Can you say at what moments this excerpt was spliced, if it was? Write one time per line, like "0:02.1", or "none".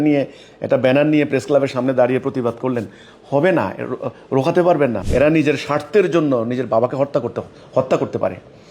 0:05.0